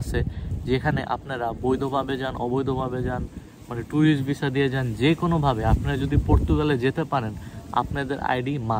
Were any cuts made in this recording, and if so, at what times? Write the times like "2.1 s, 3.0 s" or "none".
none

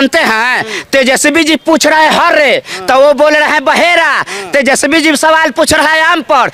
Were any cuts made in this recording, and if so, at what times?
none

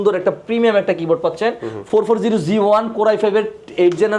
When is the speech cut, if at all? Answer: 1.7 s

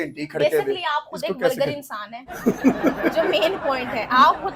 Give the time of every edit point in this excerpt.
none

